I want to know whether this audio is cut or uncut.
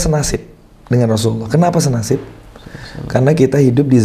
uncut